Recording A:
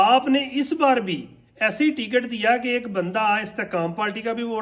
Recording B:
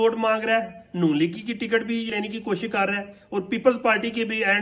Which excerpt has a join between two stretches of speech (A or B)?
B